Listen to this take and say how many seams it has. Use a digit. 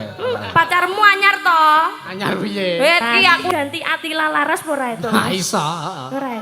1